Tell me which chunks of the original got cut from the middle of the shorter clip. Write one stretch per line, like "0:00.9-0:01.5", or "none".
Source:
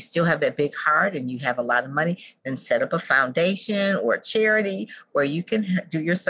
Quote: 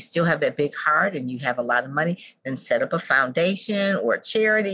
none